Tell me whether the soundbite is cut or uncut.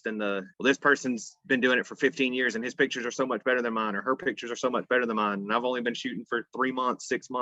uncut